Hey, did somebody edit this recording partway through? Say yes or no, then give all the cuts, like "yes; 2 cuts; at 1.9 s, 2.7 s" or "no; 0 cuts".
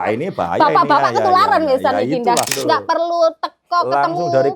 yes; 1 cut; at 2.5 s